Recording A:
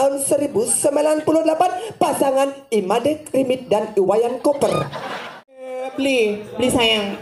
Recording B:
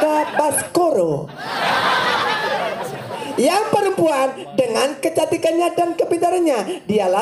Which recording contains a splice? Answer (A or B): A